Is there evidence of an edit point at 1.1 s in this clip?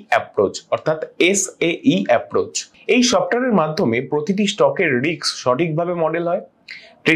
no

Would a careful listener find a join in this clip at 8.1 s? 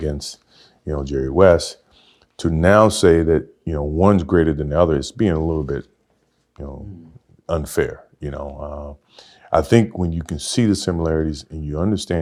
no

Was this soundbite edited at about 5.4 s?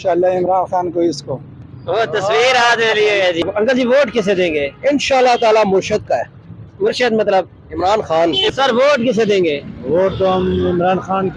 no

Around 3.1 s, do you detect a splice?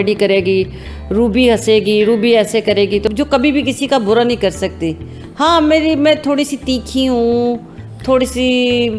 yes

